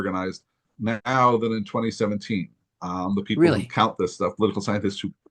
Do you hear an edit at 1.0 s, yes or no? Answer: yes